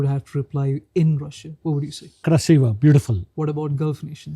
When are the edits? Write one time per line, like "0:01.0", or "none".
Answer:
0:02.2
0:03.2